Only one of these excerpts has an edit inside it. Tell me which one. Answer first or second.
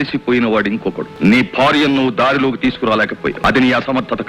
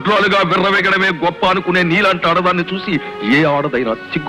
first